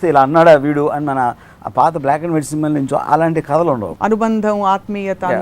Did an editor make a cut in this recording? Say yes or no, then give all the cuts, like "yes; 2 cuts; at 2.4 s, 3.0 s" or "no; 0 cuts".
yes; 1 cut; at 3.9 s